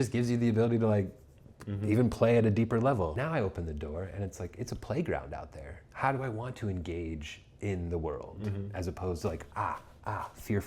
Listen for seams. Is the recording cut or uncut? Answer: cut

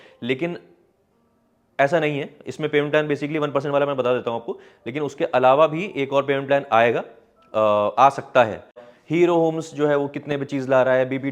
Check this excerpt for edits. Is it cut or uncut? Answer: cut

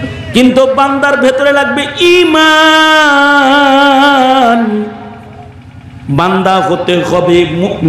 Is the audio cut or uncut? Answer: uncut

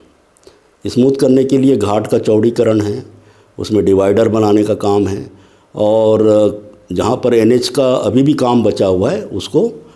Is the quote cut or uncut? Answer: uncut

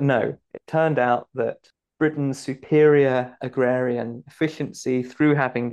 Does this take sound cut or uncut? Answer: cut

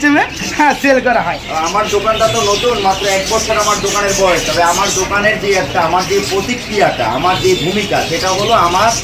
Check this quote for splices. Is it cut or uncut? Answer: uncut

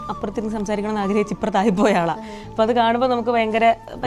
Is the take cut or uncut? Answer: uncut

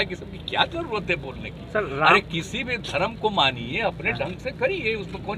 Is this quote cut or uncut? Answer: uncut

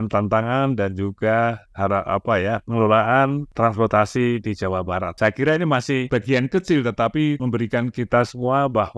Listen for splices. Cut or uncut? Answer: cut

